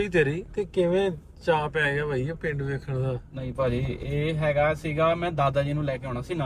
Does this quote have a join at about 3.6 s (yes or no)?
no